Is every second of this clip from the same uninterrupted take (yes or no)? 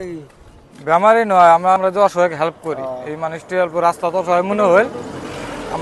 yes